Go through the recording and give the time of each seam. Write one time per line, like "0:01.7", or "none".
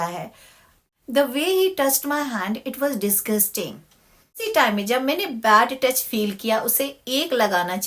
0:01.1
0:04.4